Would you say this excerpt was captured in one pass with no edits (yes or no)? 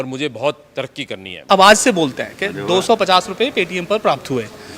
no